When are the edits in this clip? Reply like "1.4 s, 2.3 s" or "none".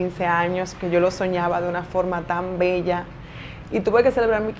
none